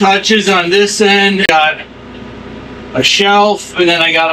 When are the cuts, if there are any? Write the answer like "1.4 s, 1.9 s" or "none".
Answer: 1.5 s